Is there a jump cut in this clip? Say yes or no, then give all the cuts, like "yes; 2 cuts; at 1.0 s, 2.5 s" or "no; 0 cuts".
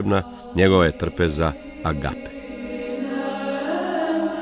yes; 1 cut; at 2.2 s